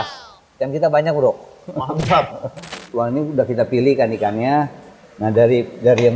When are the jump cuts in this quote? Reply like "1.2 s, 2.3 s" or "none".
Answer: 2.8 s